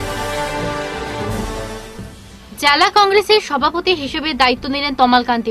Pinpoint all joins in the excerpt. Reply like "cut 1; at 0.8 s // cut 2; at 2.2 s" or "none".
cut 1; at 1.4 s